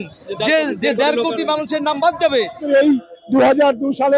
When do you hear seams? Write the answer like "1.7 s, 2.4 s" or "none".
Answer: 2.6 s